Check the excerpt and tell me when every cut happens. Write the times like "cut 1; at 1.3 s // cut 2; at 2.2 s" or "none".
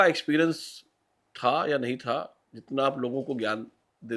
none